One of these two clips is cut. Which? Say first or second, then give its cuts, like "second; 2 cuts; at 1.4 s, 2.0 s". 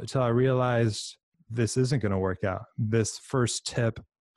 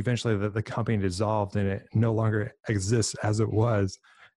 first; 1 cut; at 1.4 s